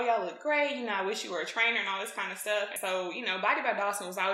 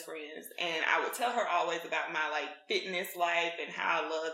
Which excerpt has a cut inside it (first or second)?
first